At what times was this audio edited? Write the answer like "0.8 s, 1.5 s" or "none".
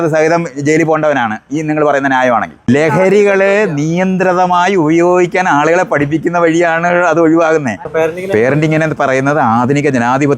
2.7 s, 7.8 s